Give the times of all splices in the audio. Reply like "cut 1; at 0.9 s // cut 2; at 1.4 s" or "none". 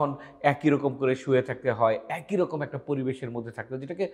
none